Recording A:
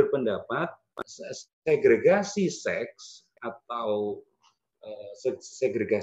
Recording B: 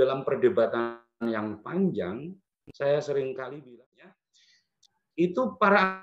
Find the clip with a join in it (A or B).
B